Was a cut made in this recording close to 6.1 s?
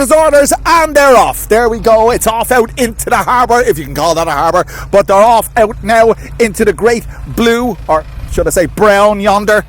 no; 0 cuts

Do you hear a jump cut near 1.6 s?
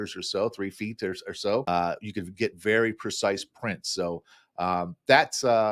yes; 1 cut; at 1.6 s

